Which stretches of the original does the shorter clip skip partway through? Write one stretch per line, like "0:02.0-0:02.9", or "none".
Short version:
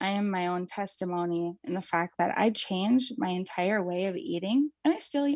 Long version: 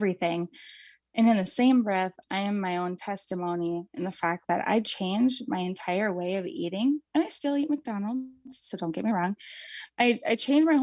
none